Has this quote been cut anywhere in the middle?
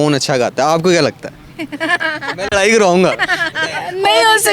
no; 0 cuts

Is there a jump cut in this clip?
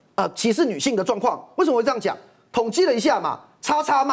no; 0 cuts

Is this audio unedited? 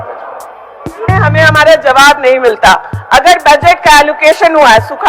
no; 1 cut; at 1.1 s

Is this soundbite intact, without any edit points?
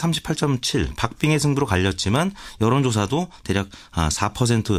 yes; 0 cuts

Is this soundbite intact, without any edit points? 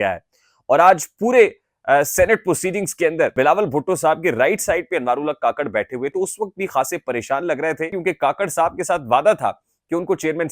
no; 3 cuts; at 3.3 s, 6.1 s, 8.0 s

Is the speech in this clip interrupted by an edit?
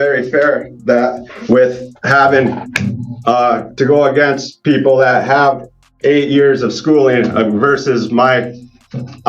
no; 0 cuts

